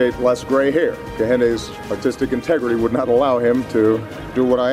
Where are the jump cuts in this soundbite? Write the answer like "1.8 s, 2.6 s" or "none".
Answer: 1.0 s, 1.7 s